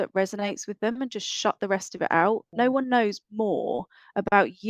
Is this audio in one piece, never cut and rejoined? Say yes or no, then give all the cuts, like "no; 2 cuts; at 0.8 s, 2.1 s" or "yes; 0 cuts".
no; 1 cut; at 2.5 s